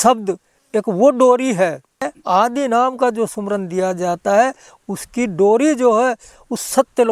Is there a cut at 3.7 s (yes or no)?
no